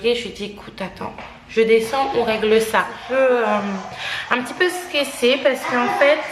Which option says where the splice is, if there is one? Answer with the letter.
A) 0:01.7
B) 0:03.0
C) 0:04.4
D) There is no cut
B